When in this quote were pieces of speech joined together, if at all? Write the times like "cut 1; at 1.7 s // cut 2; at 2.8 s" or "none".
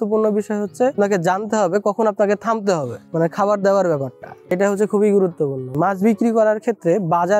cut 1; at 1.0 s // cut 2; at 4.5 s // cut 3; at 5.6 s